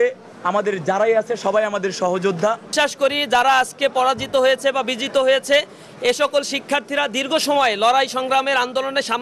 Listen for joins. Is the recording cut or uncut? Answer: cut